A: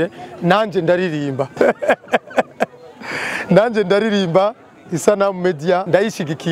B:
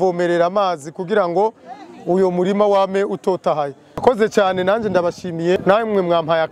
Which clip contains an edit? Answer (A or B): B